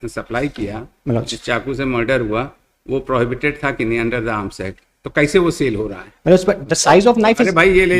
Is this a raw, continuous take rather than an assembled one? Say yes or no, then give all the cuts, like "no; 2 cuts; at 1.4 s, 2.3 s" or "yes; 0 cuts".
no; 1 cut; at 6.6 s